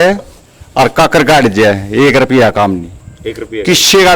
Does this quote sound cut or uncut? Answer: uncut